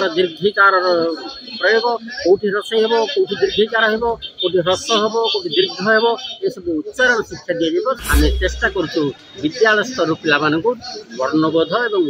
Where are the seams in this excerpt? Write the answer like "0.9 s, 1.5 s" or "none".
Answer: 8.0 s